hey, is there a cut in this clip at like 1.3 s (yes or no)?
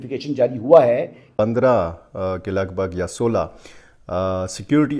yes